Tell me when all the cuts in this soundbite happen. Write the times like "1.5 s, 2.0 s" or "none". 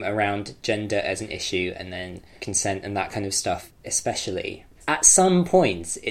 2.3 s, 3.7 s, 4.7 s

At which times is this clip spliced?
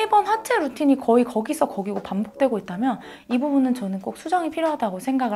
none

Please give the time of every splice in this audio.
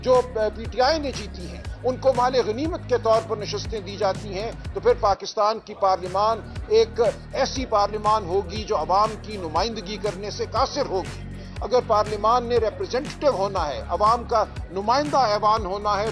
none

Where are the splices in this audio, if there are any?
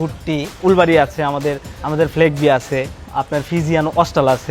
none

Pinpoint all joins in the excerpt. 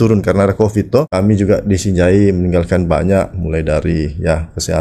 1.1 s

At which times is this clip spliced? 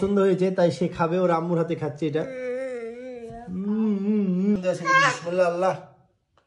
4.6 s

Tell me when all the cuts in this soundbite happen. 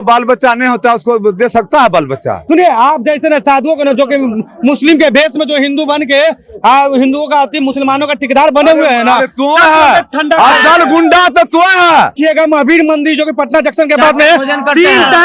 2.4 s, 12.1 s

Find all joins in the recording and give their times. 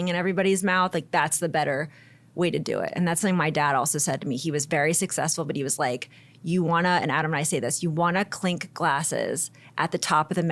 none

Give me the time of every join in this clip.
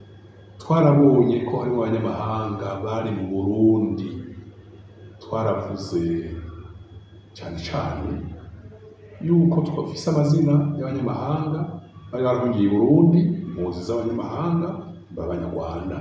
none

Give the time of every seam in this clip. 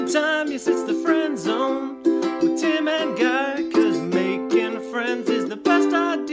none

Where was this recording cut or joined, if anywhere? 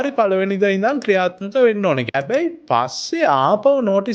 2.0 s

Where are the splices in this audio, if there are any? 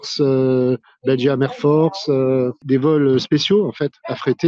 2.6 s

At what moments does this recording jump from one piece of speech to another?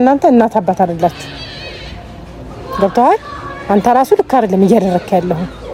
none

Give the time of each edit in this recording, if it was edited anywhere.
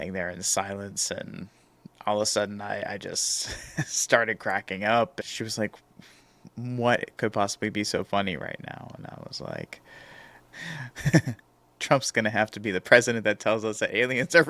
5.2 s, 10.4 s

